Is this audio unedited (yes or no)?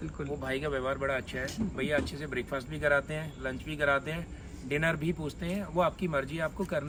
yes